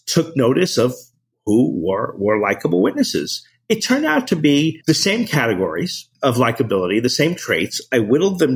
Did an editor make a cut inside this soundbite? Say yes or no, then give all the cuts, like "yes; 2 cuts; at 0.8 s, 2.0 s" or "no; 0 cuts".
yes; 2 cuts; at 4.8 s, 6.0 s